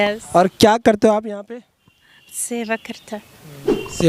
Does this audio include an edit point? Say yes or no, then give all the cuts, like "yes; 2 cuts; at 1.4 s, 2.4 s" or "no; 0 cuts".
no; 0 cuts